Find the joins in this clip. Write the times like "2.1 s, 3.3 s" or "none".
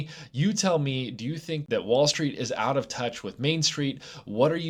none